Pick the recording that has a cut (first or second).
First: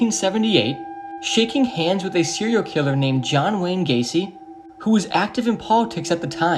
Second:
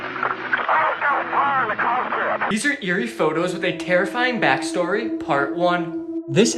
second